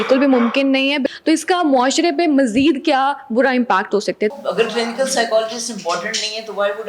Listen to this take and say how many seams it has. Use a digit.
2